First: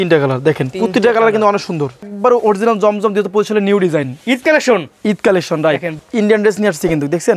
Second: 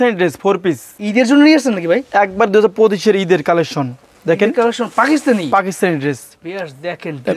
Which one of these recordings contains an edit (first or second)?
first